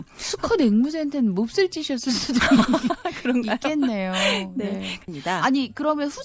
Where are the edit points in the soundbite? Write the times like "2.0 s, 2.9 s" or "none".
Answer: 5.0 s